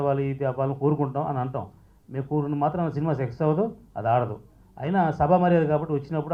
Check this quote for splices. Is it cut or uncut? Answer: uncut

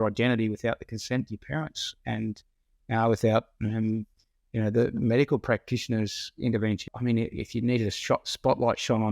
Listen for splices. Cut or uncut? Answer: cut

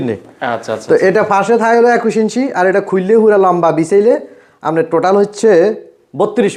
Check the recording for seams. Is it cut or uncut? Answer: uncut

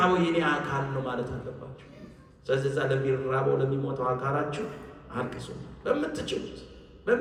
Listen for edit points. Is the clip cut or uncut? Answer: uncut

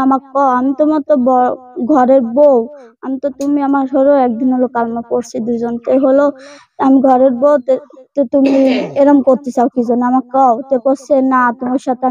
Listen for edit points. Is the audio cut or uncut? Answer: uncut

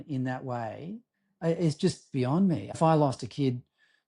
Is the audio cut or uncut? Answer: cut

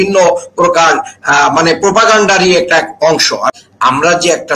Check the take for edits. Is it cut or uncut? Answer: cut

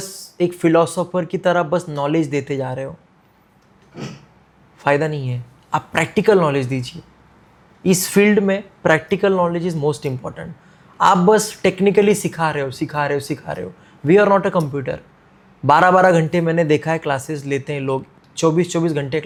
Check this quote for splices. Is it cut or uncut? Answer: uncut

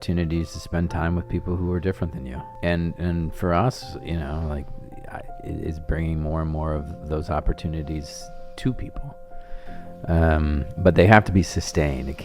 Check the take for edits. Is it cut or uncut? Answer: cut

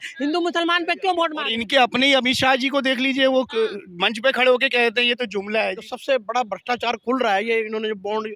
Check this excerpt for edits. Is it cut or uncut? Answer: cut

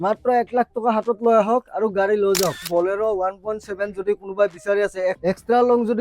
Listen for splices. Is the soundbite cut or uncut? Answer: cut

